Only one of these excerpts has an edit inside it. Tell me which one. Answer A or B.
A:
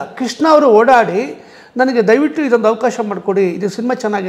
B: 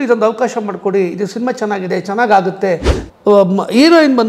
B